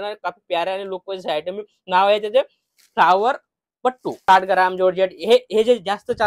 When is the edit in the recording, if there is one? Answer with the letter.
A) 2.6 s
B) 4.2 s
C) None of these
B